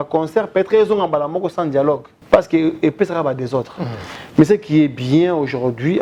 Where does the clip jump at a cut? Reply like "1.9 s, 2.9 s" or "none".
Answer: 2.1 s